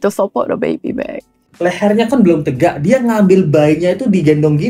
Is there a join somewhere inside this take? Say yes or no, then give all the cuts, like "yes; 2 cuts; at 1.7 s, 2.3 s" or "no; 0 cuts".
yes; 1 cut; at 1.4 s